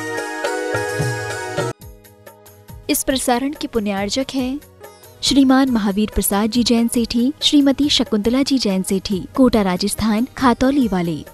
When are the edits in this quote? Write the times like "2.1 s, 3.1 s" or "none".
1.7 s

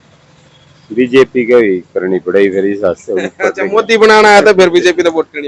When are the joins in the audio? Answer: none

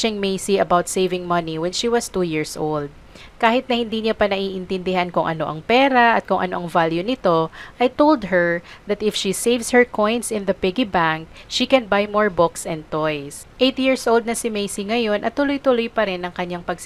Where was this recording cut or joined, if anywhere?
none

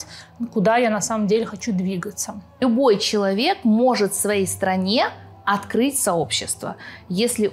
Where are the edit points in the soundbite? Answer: 2.6 s

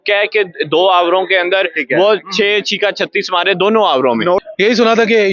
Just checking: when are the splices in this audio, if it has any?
4.4 s

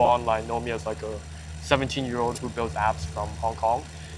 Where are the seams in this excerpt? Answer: none

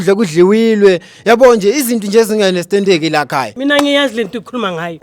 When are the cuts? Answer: 3.5 s

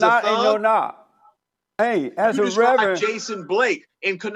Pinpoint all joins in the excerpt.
1.8 s

